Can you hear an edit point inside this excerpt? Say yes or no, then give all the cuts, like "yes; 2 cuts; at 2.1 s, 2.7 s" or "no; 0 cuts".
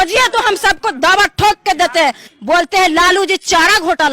yes; 1 cut; at 2.3 s